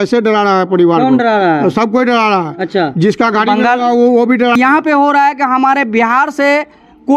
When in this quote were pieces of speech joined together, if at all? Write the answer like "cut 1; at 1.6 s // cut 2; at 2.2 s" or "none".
cut 1; at 4.5 s